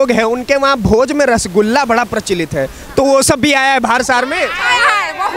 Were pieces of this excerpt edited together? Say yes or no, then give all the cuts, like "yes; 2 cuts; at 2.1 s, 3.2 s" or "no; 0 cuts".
no; 0 cuts